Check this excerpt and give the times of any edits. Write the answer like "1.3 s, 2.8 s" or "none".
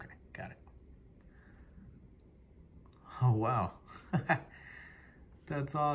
none